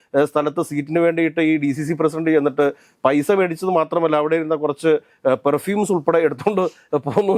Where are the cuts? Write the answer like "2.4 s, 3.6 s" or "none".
none